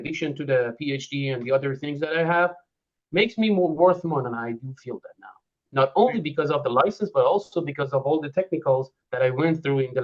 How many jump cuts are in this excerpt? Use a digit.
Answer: 0